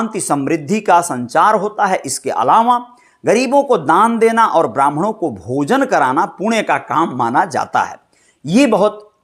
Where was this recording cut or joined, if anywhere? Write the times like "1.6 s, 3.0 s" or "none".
none